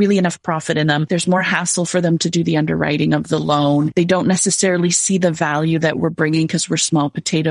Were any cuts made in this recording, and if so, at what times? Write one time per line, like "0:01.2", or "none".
0:01.0
0:03.9